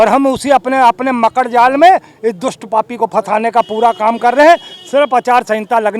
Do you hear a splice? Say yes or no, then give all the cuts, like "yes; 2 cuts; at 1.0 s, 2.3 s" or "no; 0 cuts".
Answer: no; 0 cuts